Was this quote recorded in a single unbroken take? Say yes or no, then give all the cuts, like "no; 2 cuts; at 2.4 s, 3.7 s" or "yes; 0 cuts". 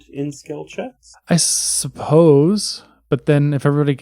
no; 1 cut; at 1.1 s